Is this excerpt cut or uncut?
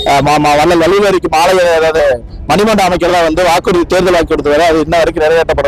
uncut